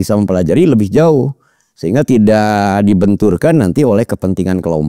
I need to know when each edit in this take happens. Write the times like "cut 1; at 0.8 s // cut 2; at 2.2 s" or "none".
none